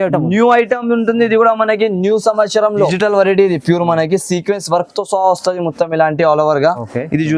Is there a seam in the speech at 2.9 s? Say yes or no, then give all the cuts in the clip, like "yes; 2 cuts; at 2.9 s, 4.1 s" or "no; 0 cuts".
yes; 1 cut; at 2.9 s